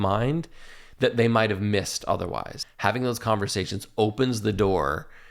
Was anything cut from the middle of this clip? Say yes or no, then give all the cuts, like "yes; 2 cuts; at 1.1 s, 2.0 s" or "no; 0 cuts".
yes; 1 cut; at 2.5 s